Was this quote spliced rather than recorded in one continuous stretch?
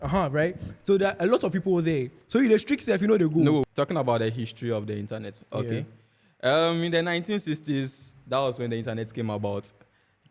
yes; 1 cut; at 3.7 s

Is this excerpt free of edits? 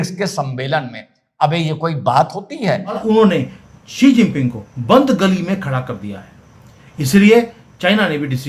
no; 1 cut; at 3.0 s

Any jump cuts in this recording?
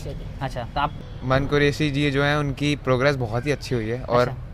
yes; 1 cut; at 1.0 s

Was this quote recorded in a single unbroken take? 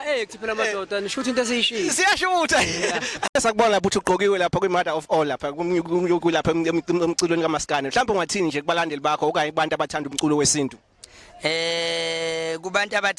no; 1 cut; at 3.4 s

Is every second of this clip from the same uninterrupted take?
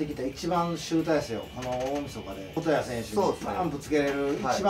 no; 1 cut; at 2.5 s

